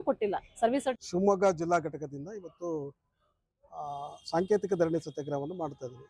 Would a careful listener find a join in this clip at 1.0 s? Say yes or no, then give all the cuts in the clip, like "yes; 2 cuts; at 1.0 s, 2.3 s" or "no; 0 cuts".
yes; 1 cut; at 1.0 s